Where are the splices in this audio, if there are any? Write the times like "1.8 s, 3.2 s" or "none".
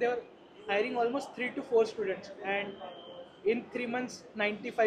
none

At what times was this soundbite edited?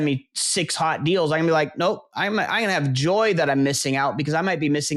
none

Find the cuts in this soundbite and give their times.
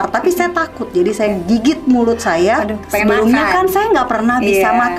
2.8 s

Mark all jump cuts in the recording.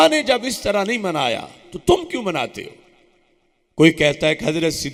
none

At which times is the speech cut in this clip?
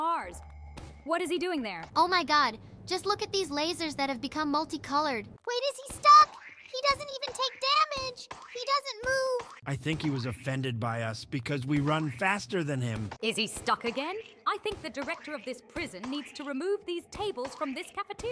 1.8 s, 5.3 s, 9.6 s, 13.1 s

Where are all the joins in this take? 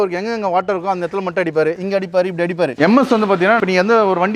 2.7 s, 3.6 s

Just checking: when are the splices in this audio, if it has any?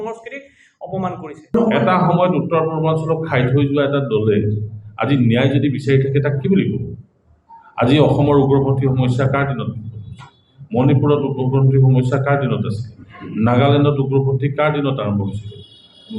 1.5 s

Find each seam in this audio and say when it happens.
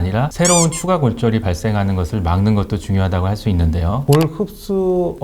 4.0 s

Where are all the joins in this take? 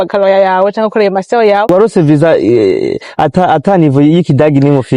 1.7 s

